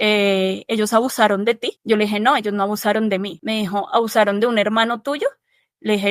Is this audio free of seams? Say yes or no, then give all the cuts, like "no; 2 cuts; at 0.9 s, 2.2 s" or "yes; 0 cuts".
no; 2 cuts; at 1.7 s, 3.4 s